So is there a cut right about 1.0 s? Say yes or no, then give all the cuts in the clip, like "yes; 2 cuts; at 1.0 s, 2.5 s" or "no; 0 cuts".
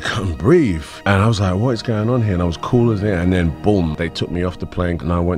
no; 0 cuts